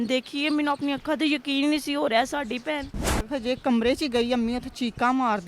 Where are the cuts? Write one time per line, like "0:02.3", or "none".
0:03.2